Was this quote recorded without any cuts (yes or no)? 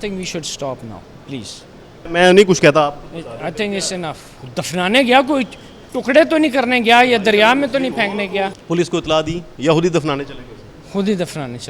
no